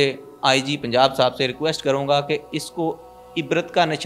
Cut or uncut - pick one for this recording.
uncut